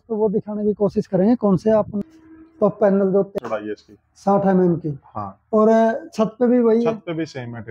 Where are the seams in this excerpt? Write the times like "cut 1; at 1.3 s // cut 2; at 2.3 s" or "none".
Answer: cut 1; at 2.0 s